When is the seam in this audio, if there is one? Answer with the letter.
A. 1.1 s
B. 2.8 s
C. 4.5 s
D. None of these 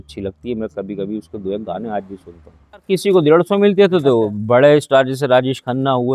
B